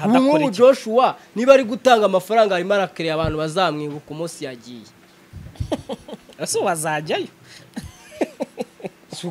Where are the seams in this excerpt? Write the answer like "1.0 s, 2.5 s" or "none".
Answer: none